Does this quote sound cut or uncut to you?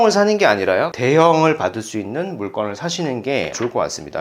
cut